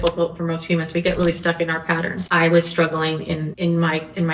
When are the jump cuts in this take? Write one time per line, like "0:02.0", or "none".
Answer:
0:02.2
0:03.5

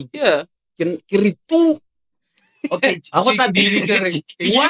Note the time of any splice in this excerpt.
none

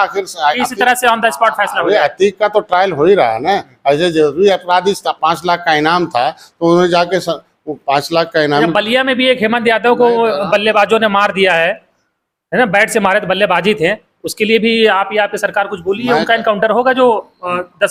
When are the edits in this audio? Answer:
none

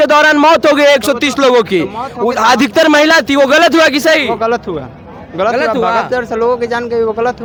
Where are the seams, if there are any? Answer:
none

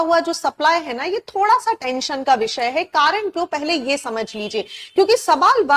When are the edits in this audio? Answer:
none

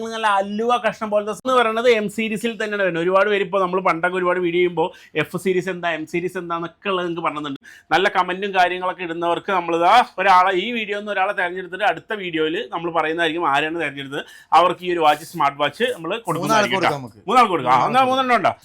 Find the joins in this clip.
0:01.4
0:07.7

